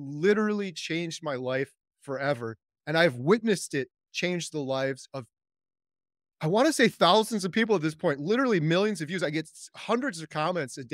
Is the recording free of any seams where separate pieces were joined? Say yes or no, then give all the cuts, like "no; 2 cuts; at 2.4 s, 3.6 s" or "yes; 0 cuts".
yes; 0 cuts